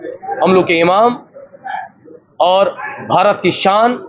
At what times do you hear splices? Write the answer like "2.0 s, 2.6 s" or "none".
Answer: none